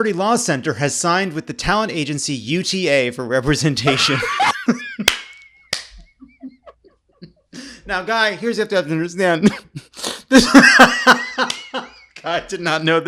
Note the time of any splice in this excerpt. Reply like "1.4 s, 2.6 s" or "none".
none